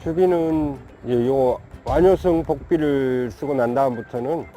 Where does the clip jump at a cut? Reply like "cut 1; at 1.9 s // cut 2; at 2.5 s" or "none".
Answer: cut 1; at 0.9 s // cut 2; at 1.7 s